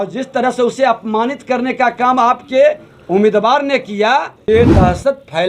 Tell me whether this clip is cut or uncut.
cut